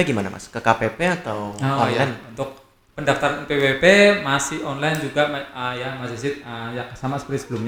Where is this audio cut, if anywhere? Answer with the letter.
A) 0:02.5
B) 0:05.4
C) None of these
C